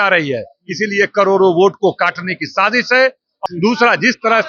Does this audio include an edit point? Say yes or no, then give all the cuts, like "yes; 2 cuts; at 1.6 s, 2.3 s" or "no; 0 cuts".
yes; 1 cut; at 3.4 s